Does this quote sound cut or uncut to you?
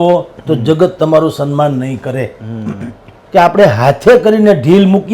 cut